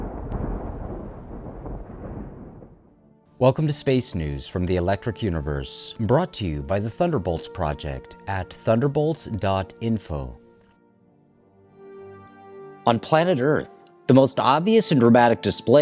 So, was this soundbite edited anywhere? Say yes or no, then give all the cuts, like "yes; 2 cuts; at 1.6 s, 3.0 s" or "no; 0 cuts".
no; 0 cuts